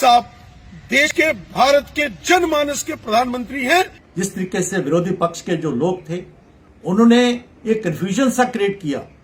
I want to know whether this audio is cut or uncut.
cut